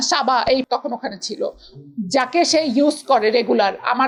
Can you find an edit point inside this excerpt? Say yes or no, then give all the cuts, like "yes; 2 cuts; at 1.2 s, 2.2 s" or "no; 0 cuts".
no; 0 cuts